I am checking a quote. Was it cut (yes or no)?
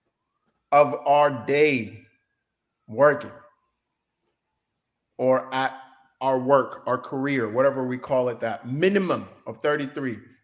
no